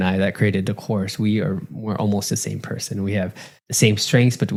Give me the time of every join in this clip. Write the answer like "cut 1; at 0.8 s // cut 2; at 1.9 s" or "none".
none